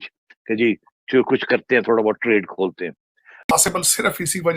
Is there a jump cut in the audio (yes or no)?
yes